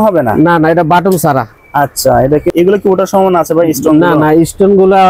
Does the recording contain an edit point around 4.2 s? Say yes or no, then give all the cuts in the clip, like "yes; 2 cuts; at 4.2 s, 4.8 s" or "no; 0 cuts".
no; 1 cut; at 2.5 s